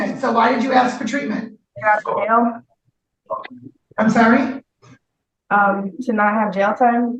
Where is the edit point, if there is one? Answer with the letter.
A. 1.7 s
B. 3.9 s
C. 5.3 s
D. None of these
A